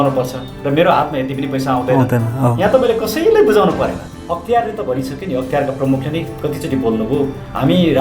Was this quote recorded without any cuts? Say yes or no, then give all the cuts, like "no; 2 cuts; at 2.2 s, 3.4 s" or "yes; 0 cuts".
no; 1 cut; at 4.1 s